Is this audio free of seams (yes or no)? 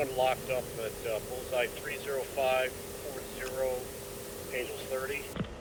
yes